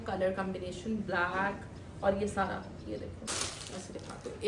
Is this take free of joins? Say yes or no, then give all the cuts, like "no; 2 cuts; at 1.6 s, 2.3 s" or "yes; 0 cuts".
no; 1 cut; at 3.3 s